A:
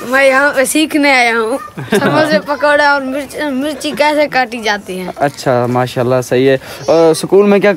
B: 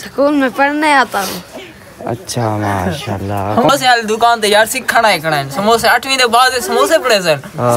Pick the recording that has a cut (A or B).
B